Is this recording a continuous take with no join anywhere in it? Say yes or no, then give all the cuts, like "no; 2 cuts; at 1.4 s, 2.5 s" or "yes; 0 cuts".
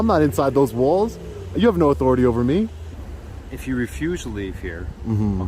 no; 1 cut; at 3.0 s